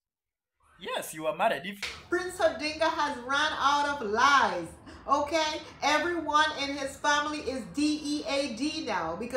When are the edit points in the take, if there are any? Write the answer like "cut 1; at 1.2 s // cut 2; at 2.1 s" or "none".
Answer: cut 1; at 1.9 s